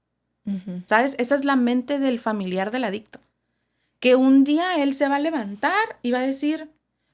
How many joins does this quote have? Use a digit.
0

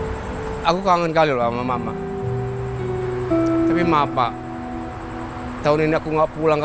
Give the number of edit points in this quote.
1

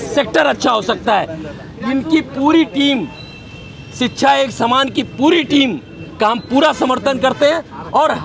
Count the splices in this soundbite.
0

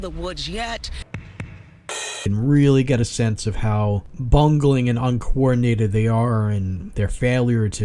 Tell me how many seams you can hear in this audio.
3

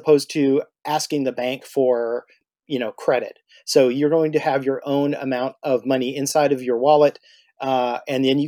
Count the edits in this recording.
1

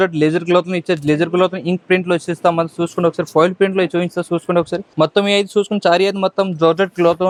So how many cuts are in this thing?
0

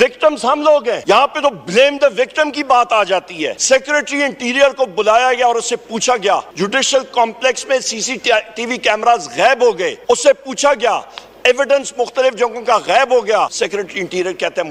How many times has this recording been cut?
0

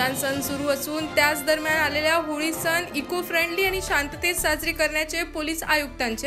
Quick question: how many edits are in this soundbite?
0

